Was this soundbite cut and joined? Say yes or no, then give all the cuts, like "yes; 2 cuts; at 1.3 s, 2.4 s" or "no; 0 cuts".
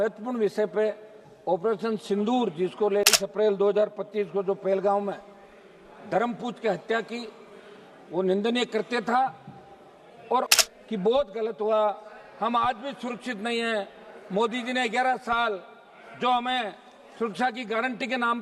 yes; 2 cuts; at 3.1 s, 10.5 s